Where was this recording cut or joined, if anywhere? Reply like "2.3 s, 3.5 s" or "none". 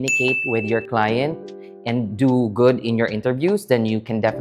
none